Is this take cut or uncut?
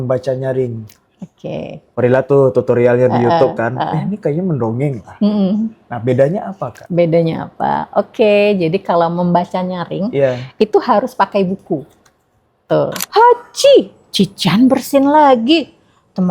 cut